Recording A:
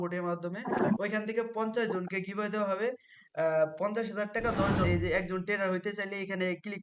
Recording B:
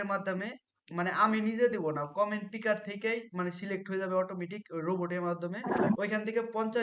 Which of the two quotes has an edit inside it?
A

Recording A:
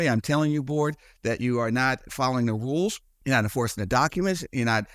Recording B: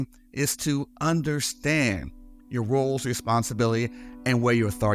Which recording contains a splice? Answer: A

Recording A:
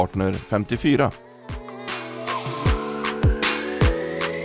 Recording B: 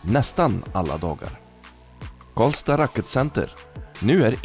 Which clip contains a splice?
A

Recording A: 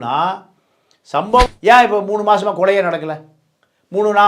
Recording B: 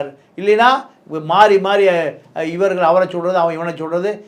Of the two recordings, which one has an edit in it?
A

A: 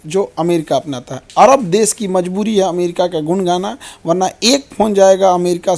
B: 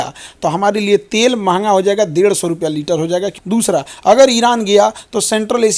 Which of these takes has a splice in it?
B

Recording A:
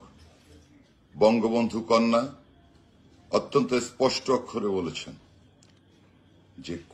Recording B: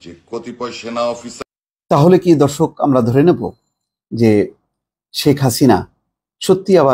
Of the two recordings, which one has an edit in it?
B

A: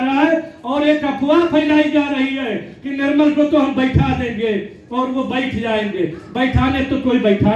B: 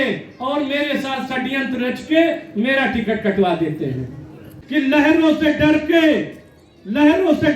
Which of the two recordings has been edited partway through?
B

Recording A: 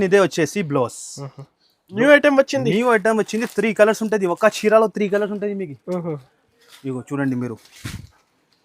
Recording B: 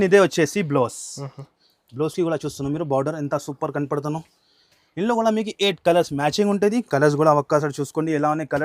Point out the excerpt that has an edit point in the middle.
A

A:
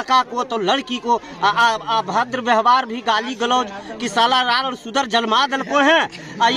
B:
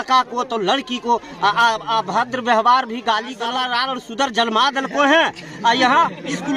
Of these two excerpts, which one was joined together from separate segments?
B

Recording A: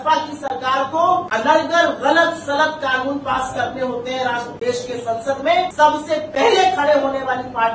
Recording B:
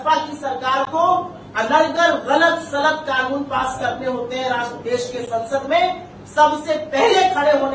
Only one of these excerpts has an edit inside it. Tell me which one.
A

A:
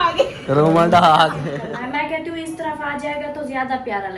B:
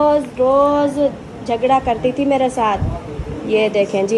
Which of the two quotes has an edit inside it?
A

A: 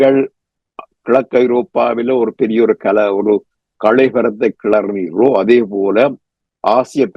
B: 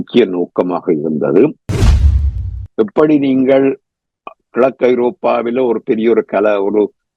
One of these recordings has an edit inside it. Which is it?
B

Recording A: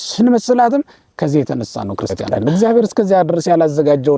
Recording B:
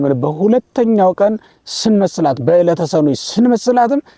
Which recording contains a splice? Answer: A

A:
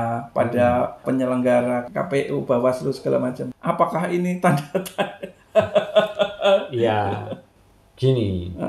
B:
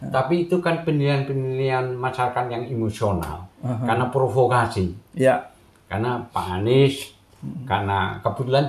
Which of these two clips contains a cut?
A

